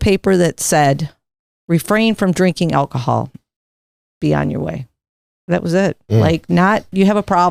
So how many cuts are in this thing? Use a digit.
0